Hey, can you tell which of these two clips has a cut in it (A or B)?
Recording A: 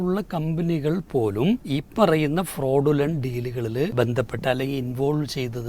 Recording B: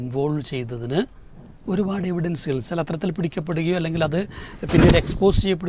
A